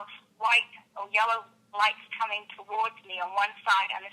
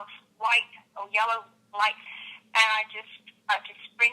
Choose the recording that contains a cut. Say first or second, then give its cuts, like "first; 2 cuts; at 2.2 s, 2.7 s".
second; 1 cut; at 2.0 s